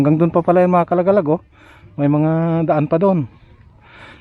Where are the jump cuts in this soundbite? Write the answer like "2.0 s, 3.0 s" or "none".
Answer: none

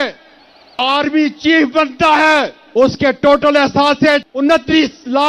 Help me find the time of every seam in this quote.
0.8 s, 2.6 s, 4.3 s

